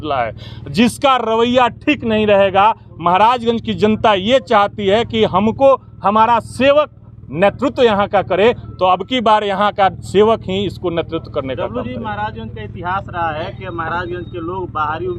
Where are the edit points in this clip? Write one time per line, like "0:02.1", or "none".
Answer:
none

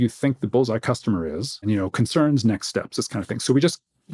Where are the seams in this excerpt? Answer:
0:01.6

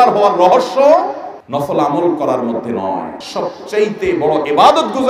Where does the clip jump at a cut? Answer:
0:03.2

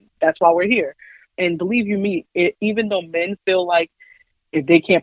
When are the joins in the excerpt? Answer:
0:01.3

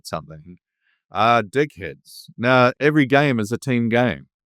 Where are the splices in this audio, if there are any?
0:02.7

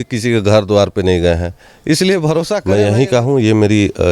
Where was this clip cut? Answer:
0:02.6

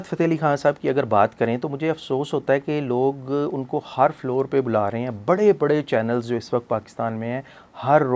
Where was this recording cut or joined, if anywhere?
none

